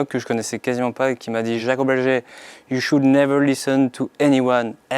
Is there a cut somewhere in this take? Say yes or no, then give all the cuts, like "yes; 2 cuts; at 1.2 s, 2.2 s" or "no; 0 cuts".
yes; 1 cut; at 1.6 s